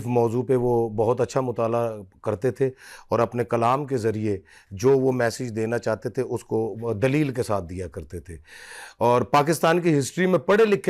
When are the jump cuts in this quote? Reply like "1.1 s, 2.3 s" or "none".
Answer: none

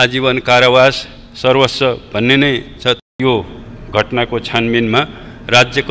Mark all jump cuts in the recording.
3.0 s

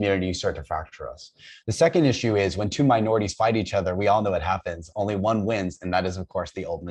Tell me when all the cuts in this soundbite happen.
none

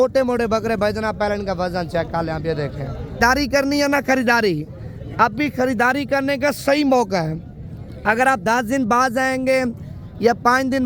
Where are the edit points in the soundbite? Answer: 3.2 s

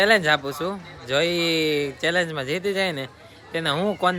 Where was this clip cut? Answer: none

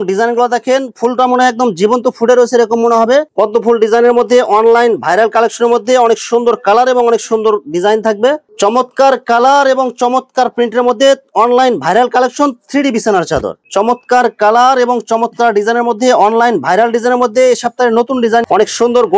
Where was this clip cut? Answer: 3.3 s, 8.5 s, 13.6 s, 18.4 s

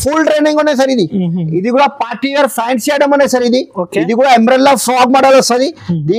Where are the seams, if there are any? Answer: 1.5 s

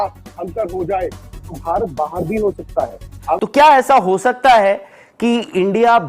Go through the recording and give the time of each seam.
3.4 s

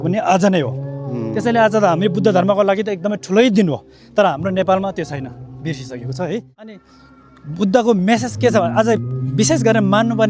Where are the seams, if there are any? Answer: 6.8 s

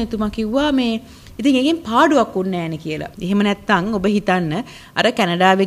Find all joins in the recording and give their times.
3.1 s

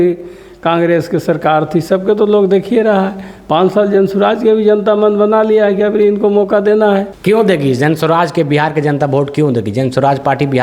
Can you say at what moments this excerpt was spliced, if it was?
7.1 s

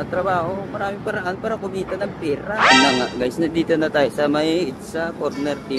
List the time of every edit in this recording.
2.7 s

